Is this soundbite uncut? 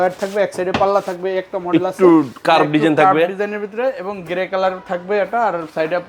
yes; 0 cuts

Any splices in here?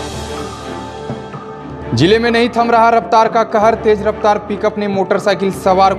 yes; 1 cut; at 1.2 s

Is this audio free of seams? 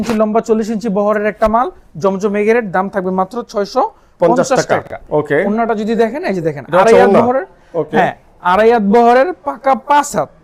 yes; 0 cuts

